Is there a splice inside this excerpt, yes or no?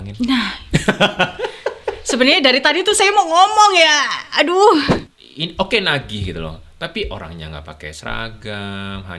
yes